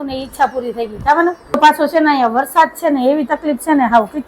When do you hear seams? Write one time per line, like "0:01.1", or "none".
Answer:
0:01.6